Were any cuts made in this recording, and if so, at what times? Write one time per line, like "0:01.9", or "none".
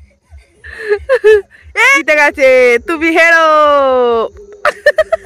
0:02.0